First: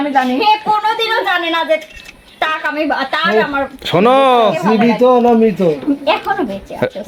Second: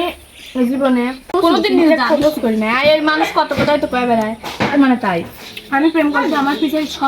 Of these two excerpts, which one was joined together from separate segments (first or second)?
second